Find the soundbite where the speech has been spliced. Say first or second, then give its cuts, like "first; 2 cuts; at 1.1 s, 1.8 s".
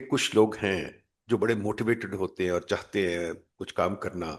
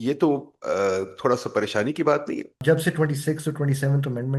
second; 1 cut; at 2.6 s